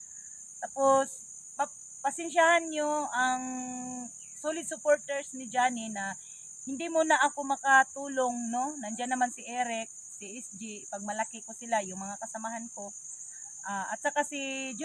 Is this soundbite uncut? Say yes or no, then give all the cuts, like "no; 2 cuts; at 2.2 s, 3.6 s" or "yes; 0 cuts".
yes; 0 cuts